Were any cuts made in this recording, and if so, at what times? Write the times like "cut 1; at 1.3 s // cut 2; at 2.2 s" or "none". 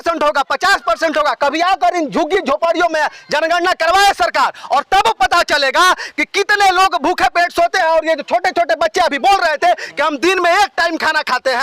none